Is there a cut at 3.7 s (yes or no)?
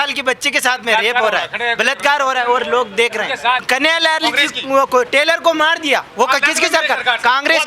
yes